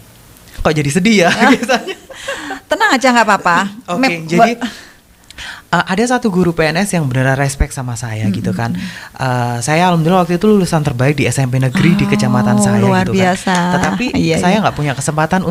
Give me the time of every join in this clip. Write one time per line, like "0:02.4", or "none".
none